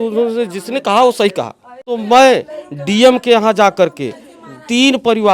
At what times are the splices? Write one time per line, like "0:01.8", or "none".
0:02.0